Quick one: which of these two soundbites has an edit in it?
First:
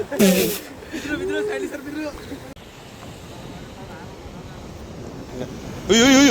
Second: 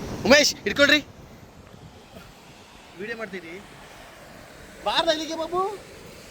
first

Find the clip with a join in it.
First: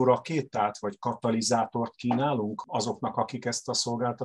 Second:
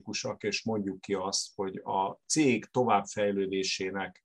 first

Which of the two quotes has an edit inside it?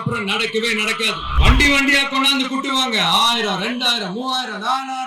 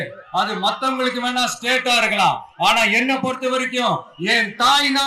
first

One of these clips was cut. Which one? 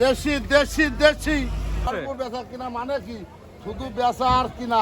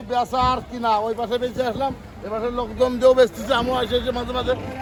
first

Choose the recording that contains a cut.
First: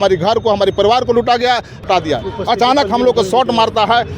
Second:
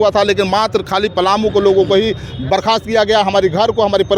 first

